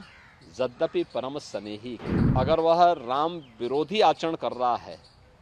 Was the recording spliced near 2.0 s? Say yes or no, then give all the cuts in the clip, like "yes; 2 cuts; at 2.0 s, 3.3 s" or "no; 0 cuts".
yes; 1 cut; at 2.0 s